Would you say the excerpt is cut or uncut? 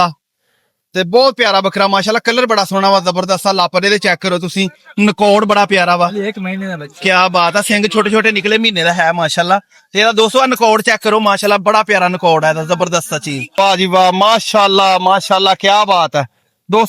cut